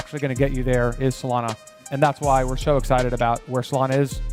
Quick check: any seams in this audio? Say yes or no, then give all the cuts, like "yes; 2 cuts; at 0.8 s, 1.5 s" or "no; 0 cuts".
no; 0 cuts